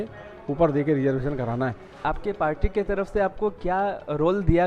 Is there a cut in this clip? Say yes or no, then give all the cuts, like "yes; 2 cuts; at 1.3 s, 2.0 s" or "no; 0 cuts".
yes; 1 cut; at 1.9 s